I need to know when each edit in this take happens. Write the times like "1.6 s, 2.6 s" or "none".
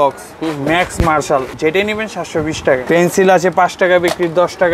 1.5 s, 2.8 s

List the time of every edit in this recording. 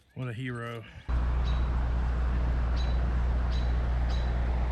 1.1 s

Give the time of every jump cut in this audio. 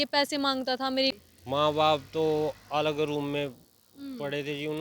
1.1 s

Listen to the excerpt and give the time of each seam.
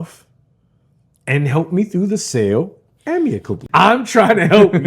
3.5 s

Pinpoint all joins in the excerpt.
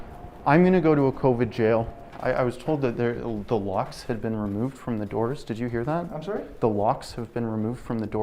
2.0 s

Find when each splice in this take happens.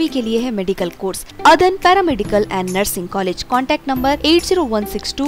1.3 s

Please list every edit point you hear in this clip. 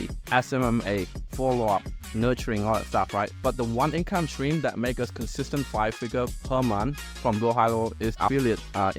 3.3 s, 7.1 s, 8.2 s

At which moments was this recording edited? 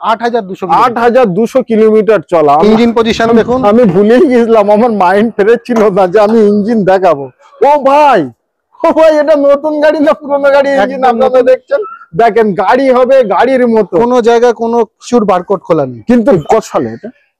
2.6 s, 16.4 s

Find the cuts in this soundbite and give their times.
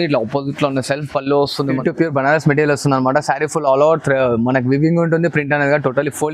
1.8 s

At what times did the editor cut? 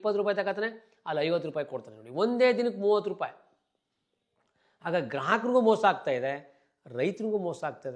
none

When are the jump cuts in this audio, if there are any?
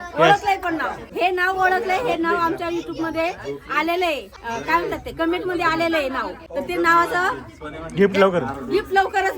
1.0 s, 4.4 s, 6.4 s

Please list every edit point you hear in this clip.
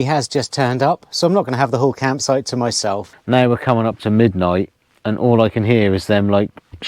3.1 s

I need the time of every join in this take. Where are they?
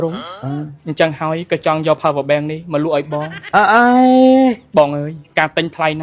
none

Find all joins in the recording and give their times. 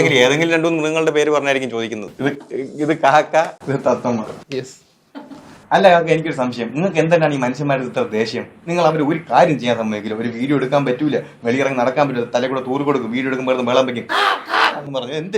2.1 s

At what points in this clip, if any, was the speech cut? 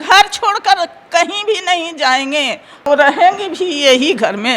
2.9 s

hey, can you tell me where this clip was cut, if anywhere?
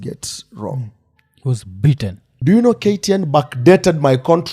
2.3 s

